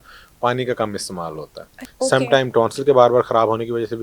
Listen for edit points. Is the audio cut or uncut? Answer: cut